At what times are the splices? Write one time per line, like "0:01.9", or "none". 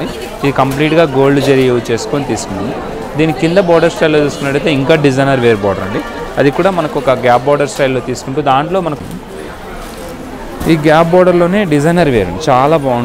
0:09.0